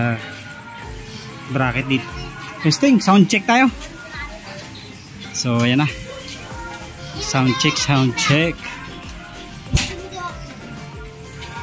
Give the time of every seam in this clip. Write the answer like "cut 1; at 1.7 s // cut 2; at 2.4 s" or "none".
cut 1; at 2.0 s